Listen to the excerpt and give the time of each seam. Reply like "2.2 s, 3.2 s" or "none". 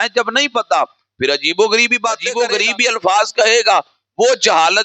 2.2 s

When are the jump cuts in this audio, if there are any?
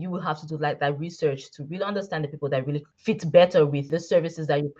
2.9 s, 3.8 s

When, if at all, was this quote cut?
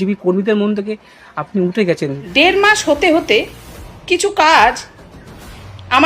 2.2 s

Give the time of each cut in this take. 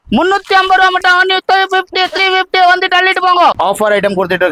3.6 s

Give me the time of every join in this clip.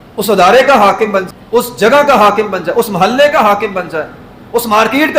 1.3 s

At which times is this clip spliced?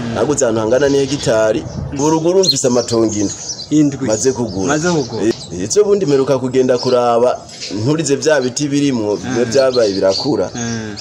2.0 s, 5.3 s

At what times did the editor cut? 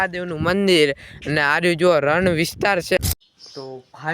3.0 s

